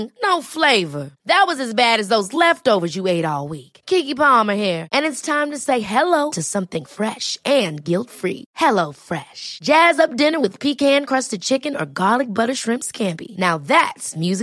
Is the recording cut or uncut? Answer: uncut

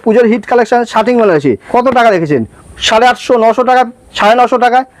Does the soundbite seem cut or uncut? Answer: cut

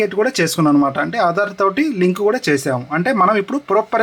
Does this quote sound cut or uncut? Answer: uncut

